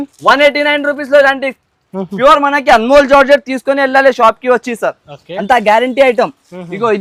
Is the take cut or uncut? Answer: uncut